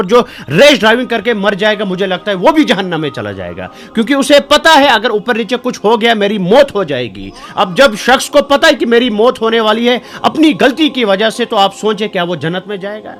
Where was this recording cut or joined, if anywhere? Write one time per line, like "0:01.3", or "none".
none